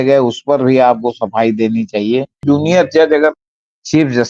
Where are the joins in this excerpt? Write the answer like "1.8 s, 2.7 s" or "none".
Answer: 2.4 s

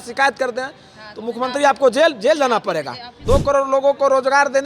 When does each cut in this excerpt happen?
3.3 s

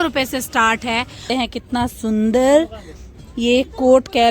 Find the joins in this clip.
1.2 s

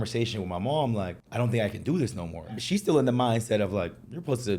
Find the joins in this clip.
1.2 s, 2.6 s

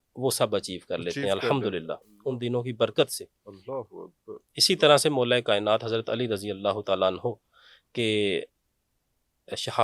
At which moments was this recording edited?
none

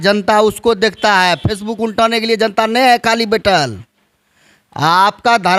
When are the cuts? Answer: none

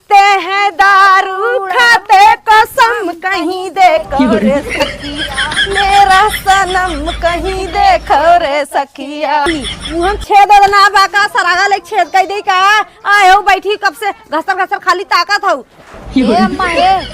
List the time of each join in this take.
9.5 s

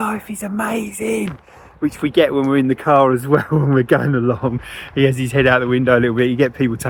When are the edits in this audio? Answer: none

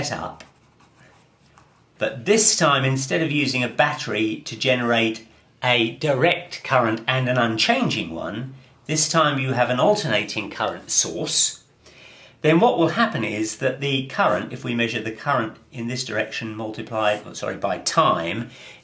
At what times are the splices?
12.9 s

